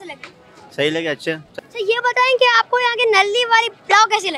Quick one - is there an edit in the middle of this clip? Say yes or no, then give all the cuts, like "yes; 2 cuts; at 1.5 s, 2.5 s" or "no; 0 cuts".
yes; 1 cut; at 1.5 s